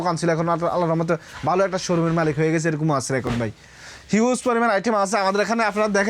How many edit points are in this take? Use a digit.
0